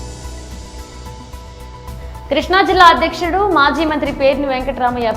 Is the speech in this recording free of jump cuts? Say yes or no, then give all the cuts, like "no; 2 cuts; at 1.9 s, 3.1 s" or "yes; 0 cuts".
no; 1 cut; at 1.3 s